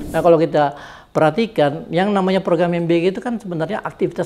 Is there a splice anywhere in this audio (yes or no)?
no